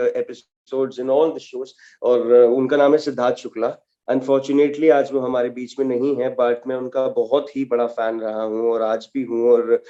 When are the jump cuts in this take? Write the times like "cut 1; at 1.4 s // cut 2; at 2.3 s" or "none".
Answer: none